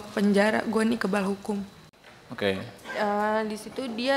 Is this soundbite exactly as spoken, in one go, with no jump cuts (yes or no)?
no